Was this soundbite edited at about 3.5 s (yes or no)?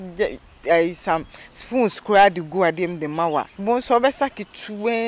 yes